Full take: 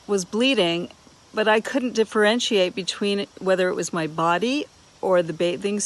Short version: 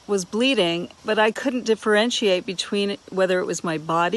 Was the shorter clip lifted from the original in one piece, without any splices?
no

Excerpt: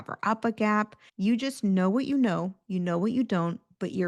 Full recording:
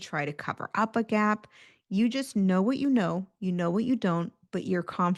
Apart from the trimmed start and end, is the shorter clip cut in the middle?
yes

